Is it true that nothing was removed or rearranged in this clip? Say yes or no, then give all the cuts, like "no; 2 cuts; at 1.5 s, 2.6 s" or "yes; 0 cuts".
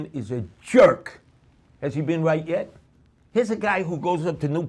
yes; 0 cuts